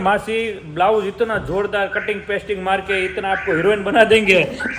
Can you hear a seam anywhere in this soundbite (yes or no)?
no